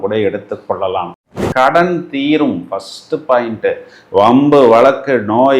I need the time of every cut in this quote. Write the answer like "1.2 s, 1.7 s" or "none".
1.4 s